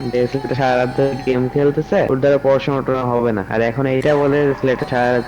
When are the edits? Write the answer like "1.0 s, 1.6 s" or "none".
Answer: 2.1 s, 3.5 s